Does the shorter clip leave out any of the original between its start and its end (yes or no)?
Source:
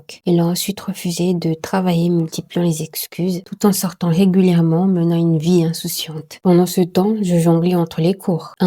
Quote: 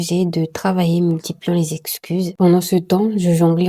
yes